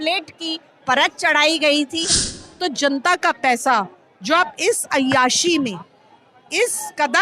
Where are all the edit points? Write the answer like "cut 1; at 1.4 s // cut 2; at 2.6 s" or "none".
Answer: cut 1; at 2.3 s